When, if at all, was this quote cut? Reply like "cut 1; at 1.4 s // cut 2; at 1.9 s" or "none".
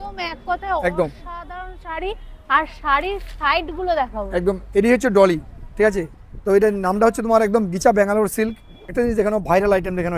cut 1; at 8.9 s